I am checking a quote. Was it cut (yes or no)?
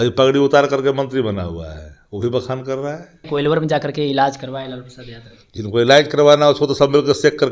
yes